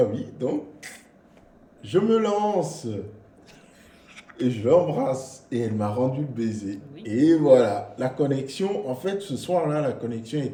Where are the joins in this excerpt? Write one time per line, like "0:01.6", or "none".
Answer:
none